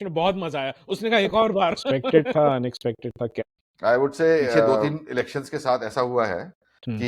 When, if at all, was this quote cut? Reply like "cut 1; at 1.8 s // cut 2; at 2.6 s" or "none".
cut 1; at 2.3 s // cut 2; at 4.8 s